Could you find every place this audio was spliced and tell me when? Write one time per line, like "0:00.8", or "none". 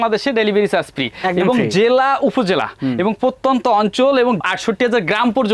none